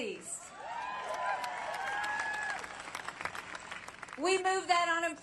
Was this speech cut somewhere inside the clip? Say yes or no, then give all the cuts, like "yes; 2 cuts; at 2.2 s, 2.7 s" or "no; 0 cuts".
yes; 1 cut; at 1.9 s